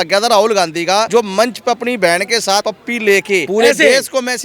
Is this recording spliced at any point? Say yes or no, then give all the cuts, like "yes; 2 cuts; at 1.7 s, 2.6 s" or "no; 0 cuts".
yes; 3 cuts; at 1.1 s, 2.6 s, 3.5 s